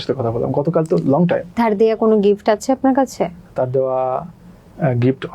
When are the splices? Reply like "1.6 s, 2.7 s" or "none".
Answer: none